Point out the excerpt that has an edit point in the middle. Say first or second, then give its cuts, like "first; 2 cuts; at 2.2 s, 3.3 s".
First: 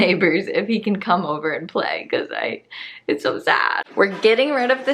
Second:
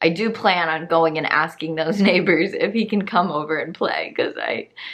first; 1 cut; at 3.8 s